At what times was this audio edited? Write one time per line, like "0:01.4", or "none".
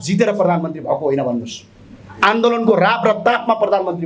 none